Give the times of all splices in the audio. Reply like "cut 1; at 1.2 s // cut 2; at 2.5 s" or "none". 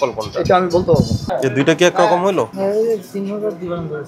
cut 1; at 1.3 s // cut 2; at 2.5 s